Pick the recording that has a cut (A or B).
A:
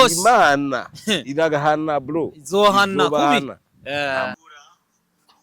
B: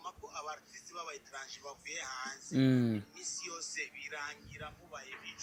A